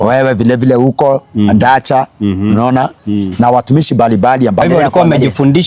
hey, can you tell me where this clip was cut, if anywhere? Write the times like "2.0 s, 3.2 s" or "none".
4.6 s